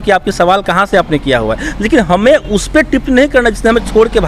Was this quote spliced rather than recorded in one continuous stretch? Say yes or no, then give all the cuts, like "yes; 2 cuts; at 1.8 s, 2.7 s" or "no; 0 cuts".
no; 0 cuts